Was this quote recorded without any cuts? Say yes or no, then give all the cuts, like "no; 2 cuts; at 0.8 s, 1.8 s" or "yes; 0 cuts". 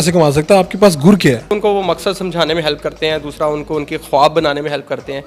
no; 1 cut; at 1.5 s